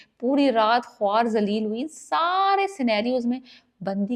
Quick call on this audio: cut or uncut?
uncut